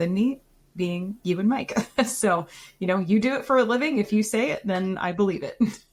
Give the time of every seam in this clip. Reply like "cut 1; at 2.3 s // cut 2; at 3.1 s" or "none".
none